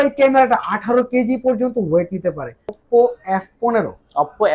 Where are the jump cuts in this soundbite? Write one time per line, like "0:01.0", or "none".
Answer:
0:02.6